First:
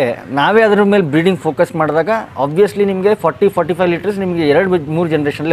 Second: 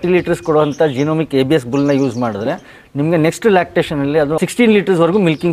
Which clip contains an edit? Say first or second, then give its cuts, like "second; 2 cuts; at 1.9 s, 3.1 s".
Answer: second; 1 cut; at 4.4 s